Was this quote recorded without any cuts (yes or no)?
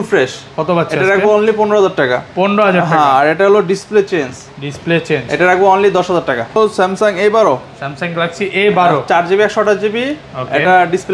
no